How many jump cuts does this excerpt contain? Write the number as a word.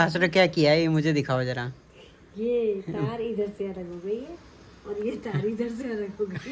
zero